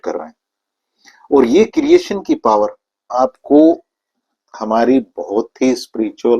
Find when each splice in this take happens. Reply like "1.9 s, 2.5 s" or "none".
3.1 s